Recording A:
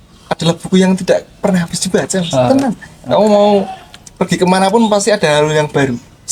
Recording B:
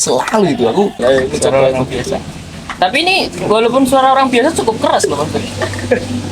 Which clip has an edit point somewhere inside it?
B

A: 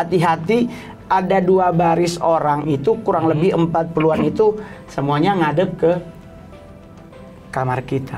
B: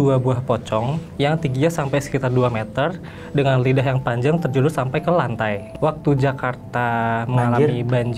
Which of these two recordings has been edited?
B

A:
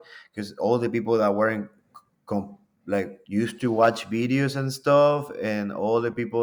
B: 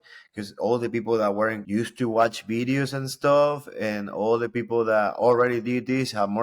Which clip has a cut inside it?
B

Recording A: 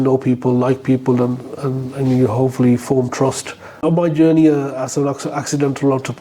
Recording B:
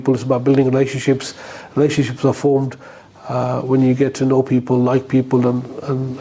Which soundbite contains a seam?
A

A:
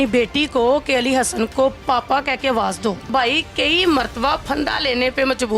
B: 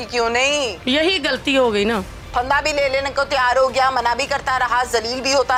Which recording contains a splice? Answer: A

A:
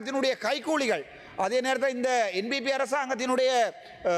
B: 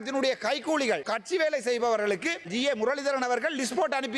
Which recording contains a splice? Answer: B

